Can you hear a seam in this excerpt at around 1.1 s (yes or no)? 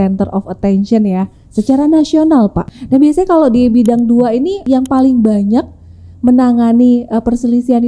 no